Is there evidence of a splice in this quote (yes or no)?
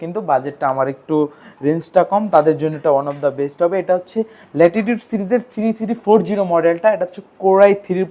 no